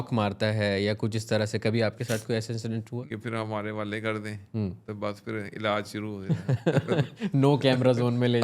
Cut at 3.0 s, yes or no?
yes